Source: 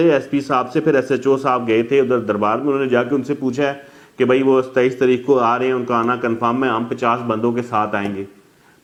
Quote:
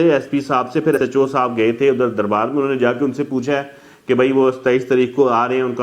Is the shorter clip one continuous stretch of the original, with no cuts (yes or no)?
no